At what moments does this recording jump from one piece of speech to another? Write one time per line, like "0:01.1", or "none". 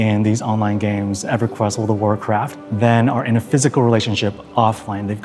0:02.6